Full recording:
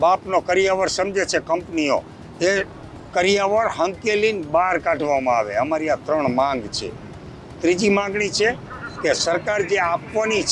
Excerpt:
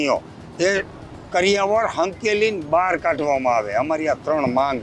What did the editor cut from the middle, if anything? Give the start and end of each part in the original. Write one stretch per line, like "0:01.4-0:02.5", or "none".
none

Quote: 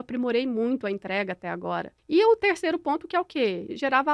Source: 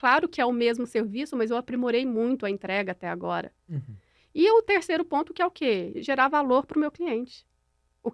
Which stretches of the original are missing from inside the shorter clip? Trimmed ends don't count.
0:03.5-0:04.2

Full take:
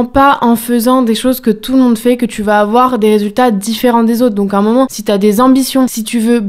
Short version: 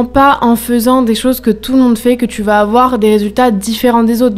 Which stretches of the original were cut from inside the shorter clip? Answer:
none

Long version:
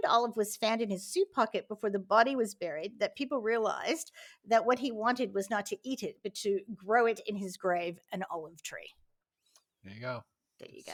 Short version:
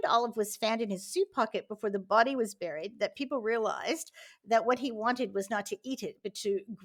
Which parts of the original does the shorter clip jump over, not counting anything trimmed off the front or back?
none

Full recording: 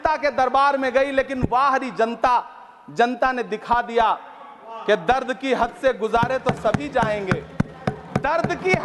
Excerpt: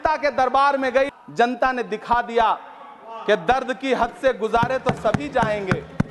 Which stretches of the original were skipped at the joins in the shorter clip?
0:01.1-0:02.7

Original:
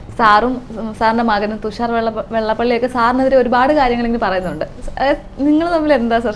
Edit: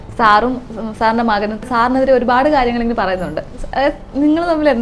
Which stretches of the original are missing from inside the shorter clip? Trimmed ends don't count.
0:01.7-0:02.9

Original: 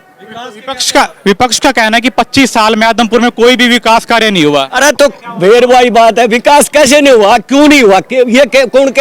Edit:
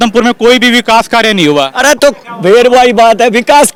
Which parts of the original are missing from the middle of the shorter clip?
none

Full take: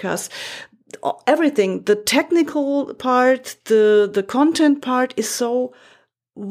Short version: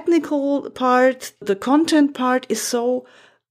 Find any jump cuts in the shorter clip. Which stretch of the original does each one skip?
0:03.7-0:04.1

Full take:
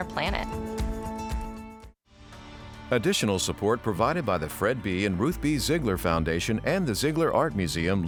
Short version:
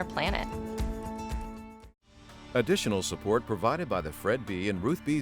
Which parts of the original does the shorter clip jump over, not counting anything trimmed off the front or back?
0:02.3-0:02.7

